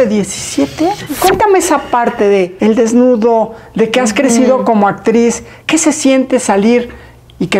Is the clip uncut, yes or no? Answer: no